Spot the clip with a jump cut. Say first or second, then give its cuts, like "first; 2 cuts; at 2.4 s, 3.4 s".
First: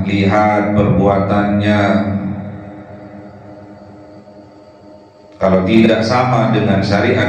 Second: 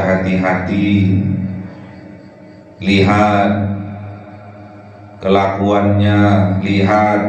first; 1 cut; at 5.8 s